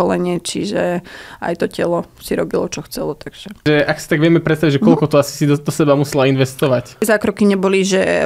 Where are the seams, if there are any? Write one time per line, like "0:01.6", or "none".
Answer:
0:03.6
0:07.0